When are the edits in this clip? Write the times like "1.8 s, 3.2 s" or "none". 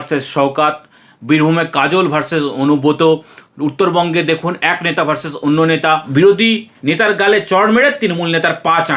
6.1 s